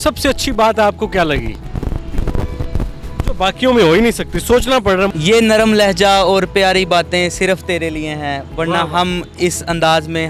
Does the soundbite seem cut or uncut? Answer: cut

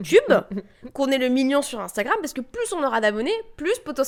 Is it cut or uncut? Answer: uncut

